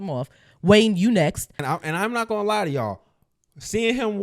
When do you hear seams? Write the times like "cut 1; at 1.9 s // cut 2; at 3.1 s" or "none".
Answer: cut 1; at 1.5 s

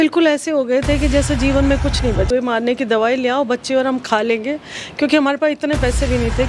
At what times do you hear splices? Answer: cut 1; at 2.3 s

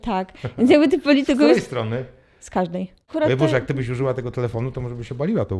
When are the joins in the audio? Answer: cut 1; at 3.1 s

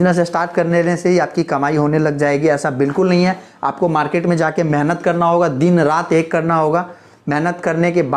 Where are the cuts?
none

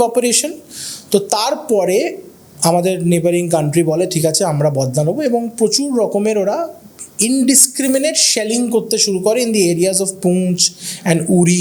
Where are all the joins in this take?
none

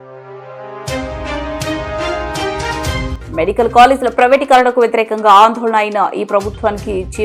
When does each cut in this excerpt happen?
none

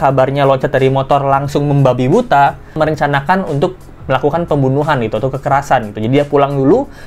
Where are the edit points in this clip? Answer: cut 1; at 2.8 s

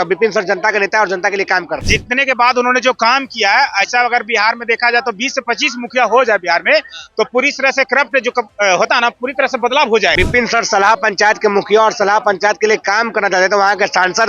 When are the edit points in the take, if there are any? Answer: cut 1; at 1.8 s // cut 2; at 10.1 s

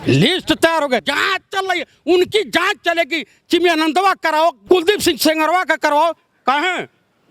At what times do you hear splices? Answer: cut 1; at 4.6 s

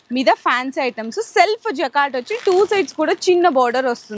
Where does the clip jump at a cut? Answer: none

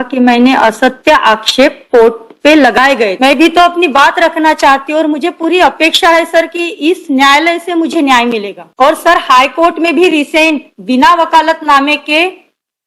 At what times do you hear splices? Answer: cut 1; at 3.1 s

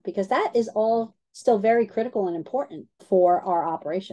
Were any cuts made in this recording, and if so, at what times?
none

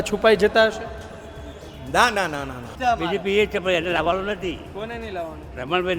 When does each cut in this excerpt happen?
cut 1; at 2.7 s

